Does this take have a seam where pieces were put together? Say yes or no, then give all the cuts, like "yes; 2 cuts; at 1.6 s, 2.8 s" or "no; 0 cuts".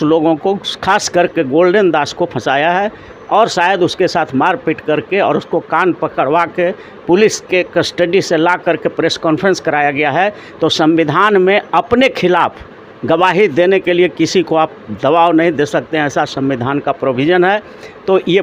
no; 0 cuts